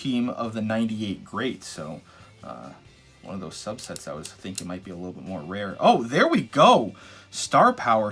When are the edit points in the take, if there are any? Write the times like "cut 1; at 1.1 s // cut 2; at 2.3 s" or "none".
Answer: none